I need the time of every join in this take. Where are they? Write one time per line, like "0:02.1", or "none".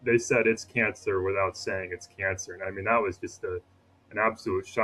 none

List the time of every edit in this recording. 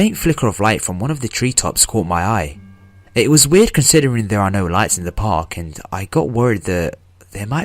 0:02.3

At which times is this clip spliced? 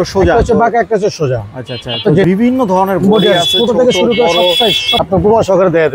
0:02.2
0:05.0

